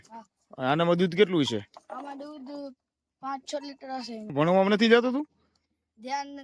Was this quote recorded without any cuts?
no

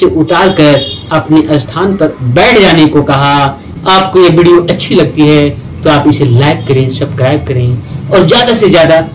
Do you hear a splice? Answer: yes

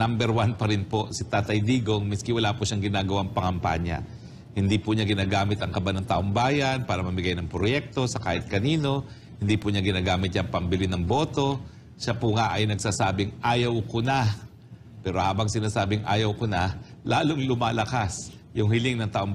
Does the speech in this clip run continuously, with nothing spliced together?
yes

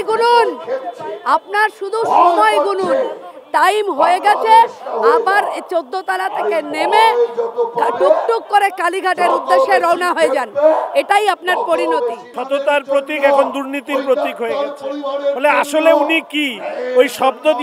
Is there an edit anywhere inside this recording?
yes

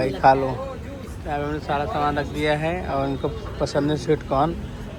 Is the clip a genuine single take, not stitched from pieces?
yes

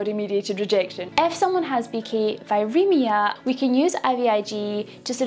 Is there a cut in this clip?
yes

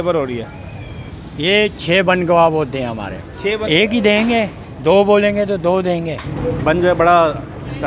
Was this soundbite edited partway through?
yes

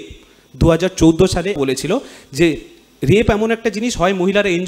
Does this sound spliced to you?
yes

